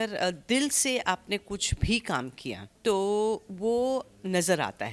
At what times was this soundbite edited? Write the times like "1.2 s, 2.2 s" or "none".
2.7 s